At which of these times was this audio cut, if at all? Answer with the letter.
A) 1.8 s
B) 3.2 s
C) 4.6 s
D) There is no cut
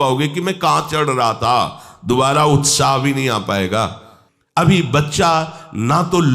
C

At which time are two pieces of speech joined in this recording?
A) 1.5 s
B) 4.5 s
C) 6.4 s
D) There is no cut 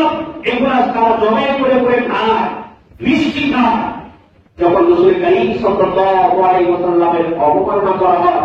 D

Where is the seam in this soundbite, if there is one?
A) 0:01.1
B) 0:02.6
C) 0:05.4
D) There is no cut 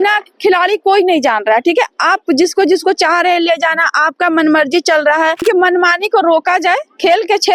C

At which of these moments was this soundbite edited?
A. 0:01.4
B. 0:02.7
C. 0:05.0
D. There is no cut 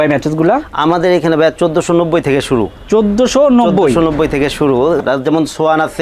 C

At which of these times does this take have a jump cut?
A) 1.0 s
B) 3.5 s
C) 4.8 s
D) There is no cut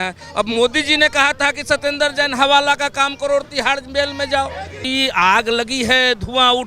C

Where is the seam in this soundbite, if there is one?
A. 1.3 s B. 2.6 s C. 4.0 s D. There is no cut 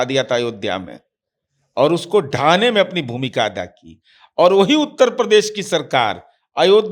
D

